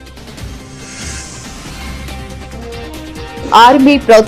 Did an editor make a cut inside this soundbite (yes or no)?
yes